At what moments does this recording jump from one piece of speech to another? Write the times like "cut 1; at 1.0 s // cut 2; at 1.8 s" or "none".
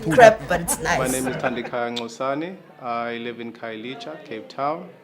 cut 1; at 2.4 s